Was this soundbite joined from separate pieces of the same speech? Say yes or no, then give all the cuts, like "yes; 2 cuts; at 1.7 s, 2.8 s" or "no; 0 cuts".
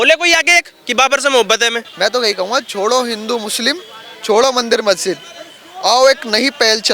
yes; 1 cut; at 1.8 s